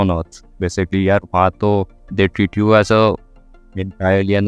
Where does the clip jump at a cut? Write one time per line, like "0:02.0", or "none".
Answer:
0:02.0